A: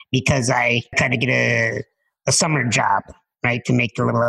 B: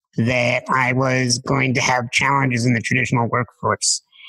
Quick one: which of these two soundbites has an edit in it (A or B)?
A